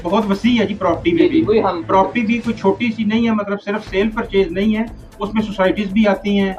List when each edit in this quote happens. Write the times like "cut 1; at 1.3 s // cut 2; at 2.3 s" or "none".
none